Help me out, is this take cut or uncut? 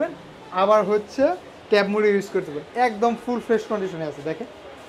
uncut